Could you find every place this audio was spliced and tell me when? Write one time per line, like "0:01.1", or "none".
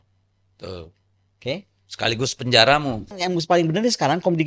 0:03.2